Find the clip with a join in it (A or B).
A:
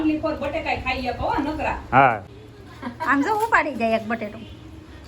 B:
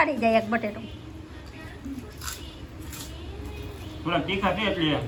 A